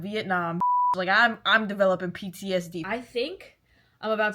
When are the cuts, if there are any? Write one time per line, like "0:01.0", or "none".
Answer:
0:02.8